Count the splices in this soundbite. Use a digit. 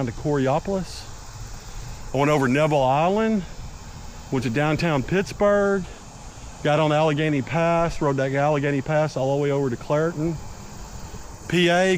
0